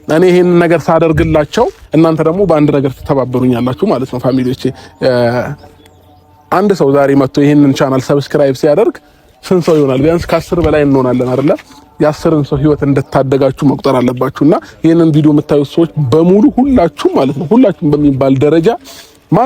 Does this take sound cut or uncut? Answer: uncut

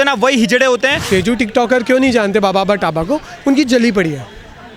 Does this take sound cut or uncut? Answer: cut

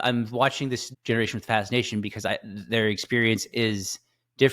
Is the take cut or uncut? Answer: cut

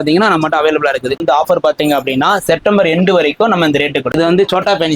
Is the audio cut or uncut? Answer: cut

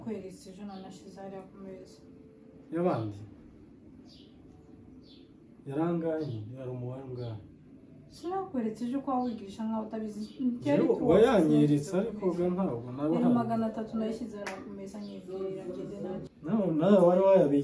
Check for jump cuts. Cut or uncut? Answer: cut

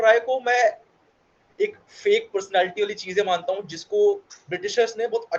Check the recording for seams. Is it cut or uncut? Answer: uncut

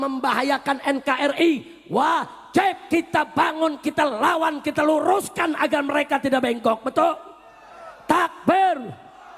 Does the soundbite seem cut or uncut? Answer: uncut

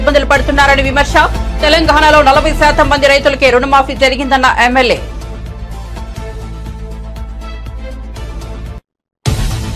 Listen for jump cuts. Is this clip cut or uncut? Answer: cut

